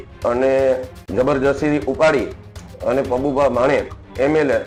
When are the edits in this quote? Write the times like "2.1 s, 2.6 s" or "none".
none